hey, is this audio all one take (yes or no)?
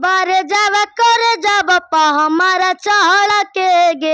yes